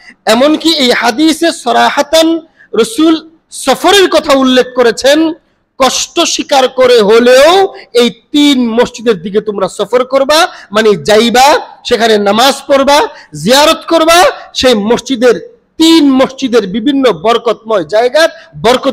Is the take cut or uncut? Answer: uncut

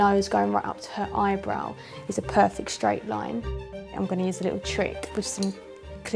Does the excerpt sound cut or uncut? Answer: cut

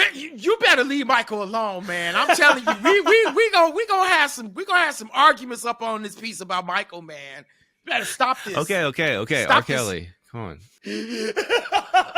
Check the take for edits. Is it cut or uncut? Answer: cut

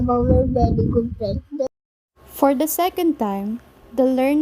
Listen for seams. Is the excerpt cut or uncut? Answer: uncut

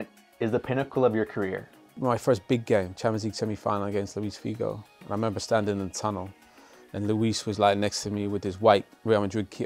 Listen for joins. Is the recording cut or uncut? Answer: cut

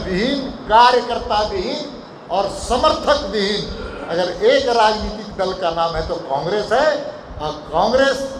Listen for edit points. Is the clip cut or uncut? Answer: uncut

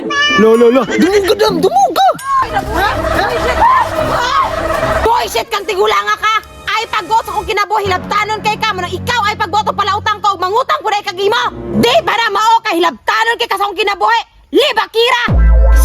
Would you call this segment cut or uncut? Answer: cut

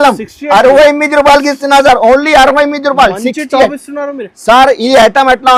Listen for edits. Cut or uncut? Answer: uncut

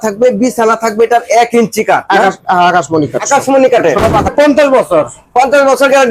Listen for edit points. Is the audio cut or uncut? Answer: cut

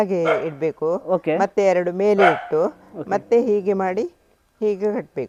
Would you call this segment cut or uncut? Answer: uncut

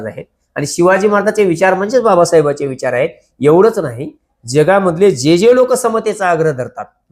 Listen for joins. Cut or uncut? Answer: uncut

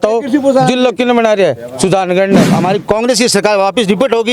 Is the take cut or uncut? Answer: cut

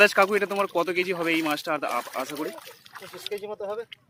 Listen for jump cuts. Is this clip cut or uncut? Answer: uncut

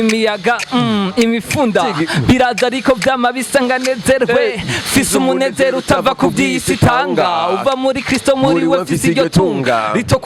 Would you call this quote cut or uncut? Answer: uncut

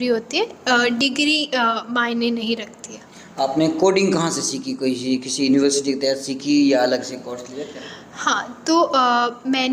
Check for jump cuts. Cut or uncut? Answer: uncut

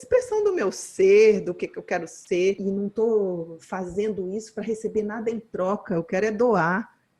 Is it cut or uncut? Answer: cut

